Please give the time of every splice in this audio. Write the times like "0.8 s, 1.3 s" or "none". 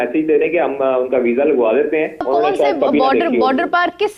2.2 s